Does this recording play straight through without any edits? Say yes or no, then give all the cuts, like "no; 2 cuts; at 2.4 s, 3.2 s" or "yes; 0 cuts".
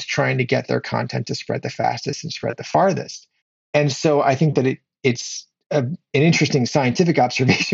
no; 1 cut; at 3.6 s